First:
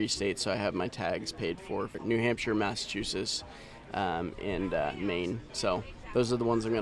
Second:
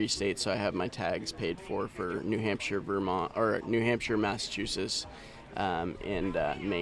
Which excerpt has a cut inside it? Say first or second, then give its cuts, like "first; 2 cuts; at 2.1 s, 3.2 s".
first; 1 cut; at 2.0 s